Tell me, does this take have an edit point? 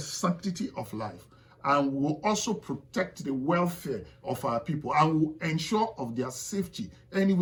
no; 0 cuts

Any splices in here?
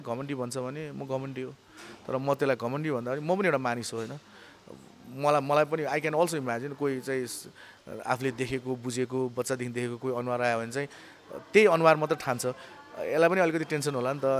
no; 0 cuts

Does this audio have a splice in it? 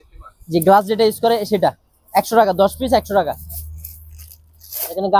no; 0 cuts

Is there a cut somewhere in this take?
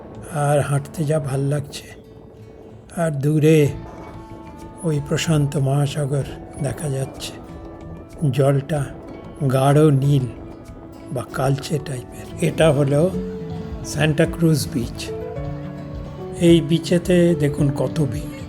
yes; 1 cut; at 12.2 s

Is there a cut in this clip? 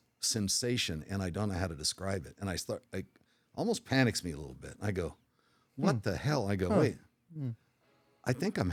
no; 0 cuts

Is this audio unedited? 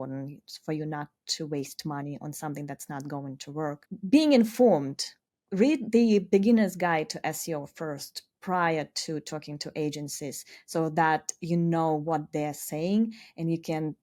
yes; 0 cuts

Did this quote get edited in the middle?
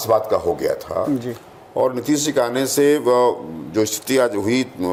no; 0 cuts

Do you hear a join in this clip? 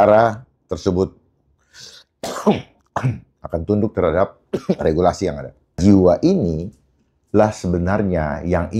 yes; 1 cut; at 5.8 s

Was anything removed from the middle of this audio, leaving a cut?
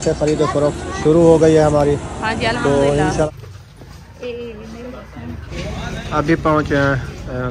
yes; 2 cuts; at 3.2 s, 5.5 s

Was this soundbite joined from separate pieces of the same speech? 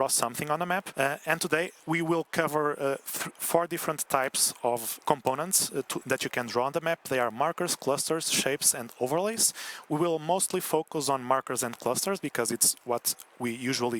yes; 2 cuts; at 0.9 s, 4.9 s

